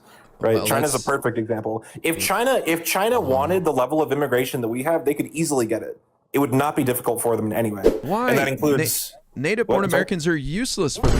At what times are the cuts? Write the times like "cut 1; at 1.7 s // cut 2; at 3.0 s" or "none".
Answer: cut 1; at 8.0 s